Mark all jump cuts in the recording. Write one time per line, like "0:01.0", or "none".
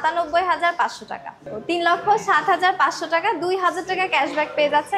0:01.5